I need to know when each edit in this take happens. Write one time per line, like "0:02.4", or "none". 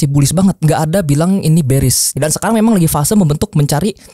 0:02.2